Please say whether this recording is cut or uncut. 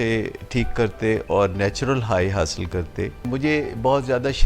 cut